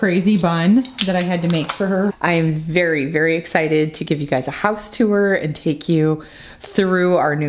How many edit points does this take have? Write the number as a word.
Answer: one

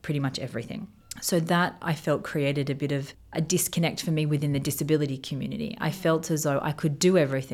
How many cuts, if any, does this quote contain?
two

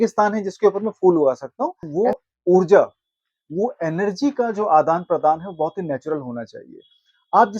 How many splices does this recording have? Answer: one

